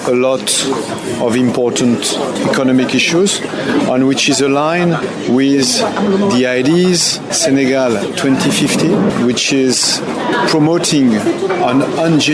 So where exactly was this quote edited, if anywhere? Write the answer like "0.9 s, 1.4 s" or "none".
7.3 s, 10.1 s